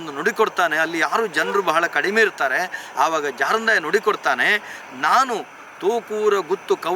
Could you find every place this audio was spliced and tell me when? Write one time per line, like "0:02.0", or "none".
none